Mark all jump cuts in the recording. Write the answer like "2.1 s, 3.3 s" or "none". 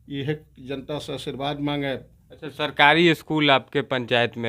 none